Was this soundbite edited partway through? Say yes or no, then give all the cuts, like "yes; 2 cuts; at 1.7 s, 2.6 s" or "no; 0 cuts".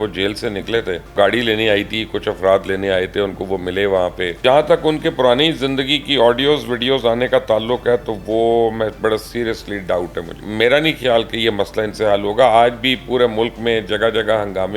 yes; 3 cuts; at 1.1 s, 4.3 s, 10.4 s